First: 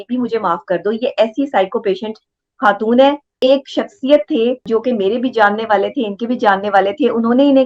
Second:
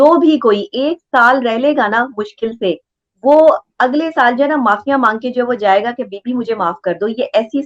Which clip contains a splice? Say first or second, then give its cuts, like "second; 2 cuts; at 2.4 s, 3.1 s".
first; 2 cuts; at 3.4 s, 4.7 s